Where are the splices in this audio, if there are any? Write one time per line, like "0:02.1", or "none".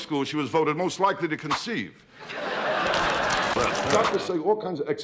0:03.8